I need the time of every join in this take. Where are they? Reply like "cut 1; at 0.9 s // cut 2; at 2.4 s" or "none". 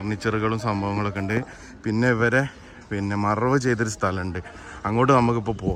none